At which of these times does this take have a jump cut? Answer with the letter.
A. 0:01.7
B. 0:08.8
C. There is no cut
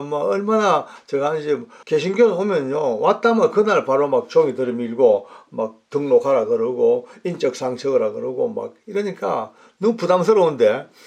A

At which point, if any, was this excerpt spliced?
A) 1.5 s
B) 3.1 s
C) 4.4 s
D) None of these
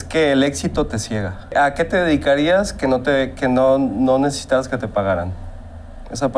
A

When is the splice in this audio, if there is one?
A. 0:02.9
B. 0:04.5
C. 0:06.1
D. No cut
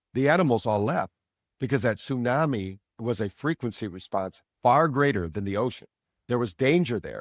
A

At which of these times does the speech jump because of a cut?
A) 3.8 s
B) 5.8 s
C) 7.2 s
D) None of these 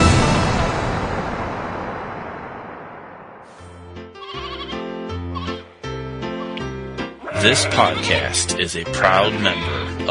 A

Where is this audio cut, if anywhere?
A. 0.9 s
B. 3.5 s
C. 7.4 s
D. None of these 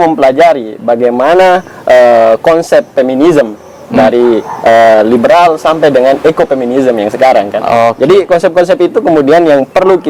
D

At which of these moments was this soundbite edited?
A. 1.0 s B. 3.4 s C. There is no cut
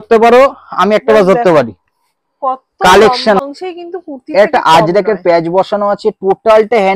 B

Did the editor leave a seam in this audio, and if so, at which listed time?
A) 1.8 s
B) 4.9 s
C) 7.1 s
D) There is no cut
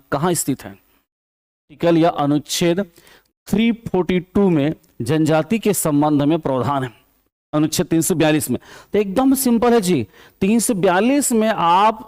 A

